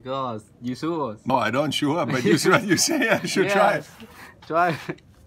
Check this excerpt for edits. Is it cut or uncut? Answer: cut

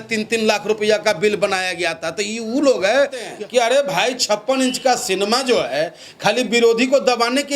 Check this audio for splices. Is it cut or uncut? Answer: cut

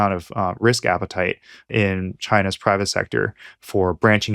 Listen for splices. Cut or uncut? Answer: cut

